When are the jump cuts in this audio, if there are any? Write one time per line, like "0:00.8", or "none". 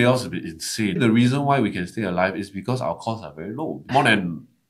0:01.0
0:03.9